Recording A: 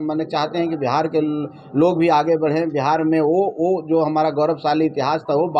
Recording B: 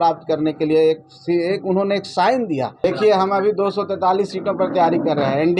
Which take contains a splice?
B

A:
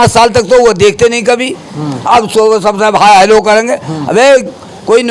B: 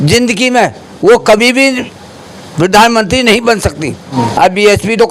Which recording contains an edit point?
B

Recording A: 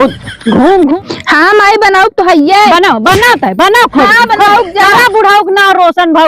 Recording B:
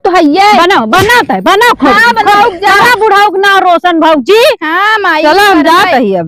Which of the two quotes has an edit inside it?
A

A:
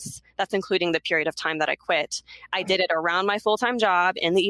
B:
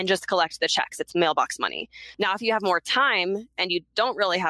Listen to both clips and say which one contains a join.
B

